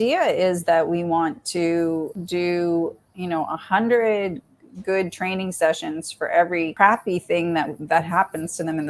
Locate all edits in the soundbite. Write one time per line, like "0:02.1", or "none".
0:02.2
0:06.7

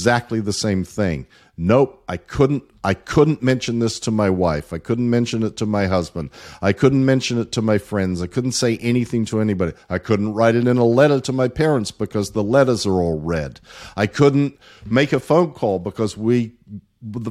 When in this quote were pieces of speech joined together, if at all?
none

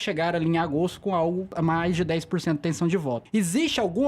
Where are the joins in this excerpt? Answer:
0:01.5
0:03.2

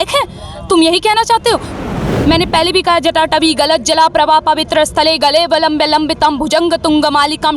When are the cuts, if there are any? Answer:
0:01.8

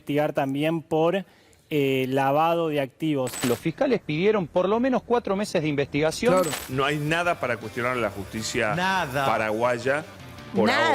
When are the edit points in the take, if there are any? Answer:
0:03.4
0:06.6

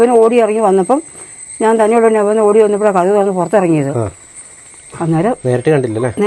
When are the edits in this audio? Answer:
none

